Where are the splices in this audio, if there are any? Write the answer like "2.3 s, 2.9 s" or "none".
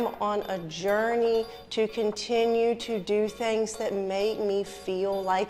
none